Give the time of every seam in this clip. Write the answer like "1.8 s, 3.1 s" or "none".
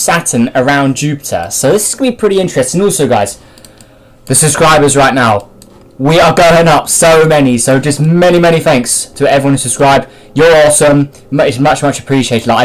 1.9 s